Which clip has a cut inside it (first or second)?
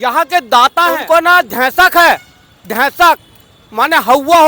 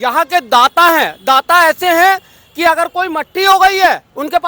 first